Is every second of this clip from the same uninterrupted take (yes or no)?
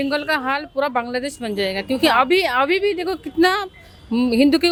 yes